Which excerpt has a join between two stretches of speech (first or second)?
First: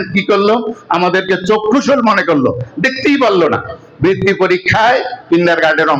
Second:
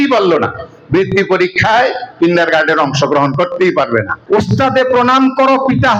second